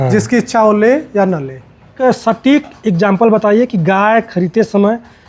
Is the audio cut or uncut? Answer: cut